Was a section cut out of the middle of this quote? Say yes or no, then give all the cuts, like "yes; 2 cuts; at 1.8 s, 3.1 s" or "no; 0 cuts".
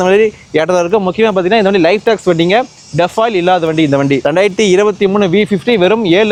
no; 0 cuts